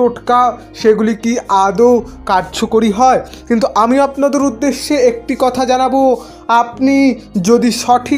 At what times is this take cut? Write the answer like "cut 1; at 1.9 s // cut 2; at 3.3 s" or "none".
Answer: none

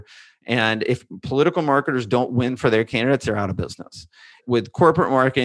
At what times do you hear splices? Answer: cut 1; at 4.4 s

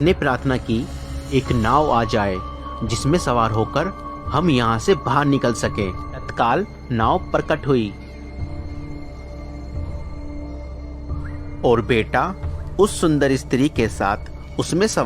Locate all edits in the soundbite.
none

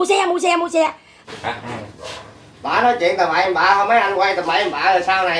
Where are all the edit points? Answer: cut 1; at 1.1 s

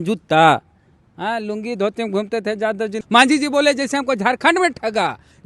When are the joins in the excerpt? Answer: cut 1; at 3.0 s

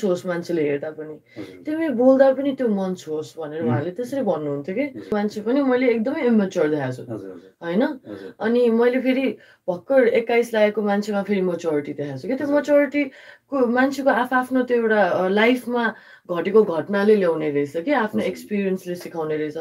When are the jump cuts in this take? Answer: cut 1; at 5.1 s

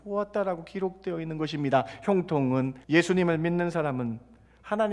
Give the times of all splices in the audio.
cut 1; at 2.8 s

